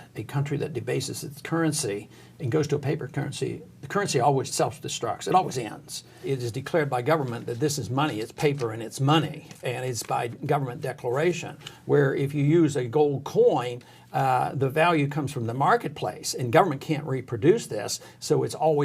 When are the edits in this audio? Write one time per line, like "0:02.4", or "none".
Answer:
0:04.5
0:06.2